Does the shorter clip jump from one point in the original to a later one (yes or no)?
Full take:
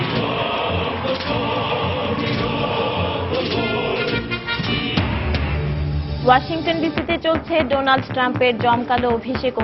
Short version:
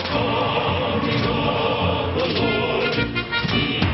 no